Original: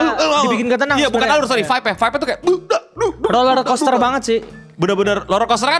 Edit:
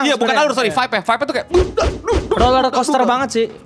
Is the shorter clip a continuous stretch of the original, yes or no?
yes